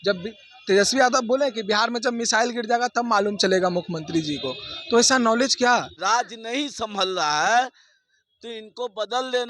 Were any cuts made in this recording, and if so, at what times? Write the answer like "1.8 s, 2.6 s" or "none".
5.9 s